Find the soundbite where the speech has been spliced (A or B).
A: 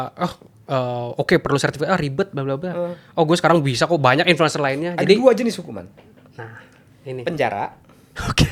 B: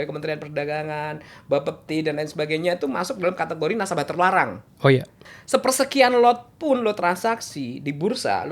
B